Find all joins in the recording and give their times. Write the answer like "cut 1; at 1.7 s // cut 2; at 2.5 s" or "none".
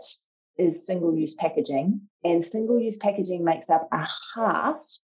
cut 1; at 2.1 s